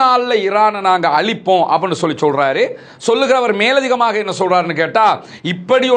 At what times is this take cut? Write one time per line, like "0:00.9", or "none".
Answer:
none